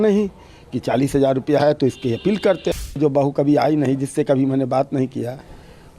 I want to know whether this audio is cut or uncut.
cut